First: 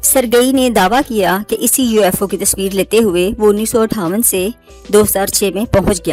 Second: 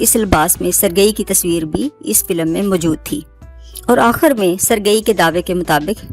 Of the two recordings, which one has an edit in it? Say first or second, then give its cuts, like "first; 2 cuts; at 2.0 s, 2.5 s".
second; 1 cut; at 3.3 s